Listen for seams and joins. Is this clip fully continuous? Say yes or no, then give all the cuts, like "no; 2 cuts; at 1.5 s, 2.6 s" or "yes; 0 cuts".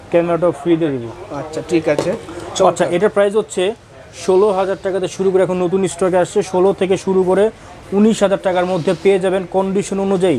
yes; 0 cuts